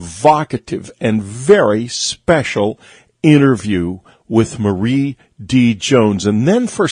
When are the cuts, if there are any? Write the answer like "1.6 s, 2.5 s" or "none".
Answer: 2.6 s